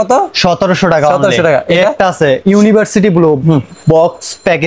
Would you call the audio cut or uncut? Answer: uncut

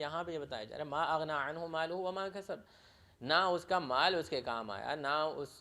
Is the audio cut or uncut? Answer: uncut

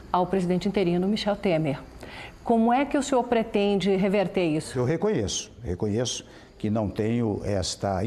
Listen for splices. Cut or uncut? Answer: cut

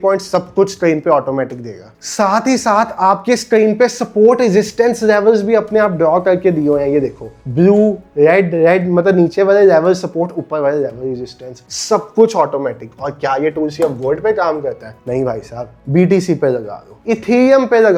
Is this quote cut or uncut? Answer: uncut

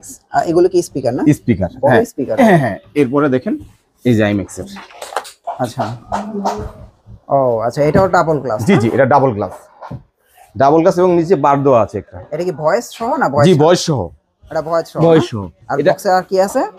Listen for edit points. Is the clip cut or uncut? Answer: uncut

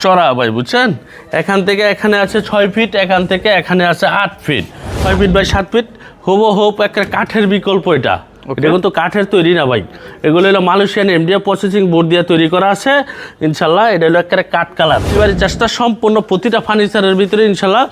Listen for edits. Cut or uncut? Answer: cut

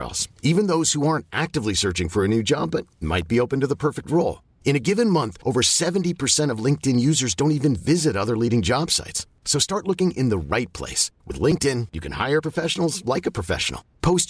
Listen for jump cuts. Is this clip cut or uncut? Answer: uncut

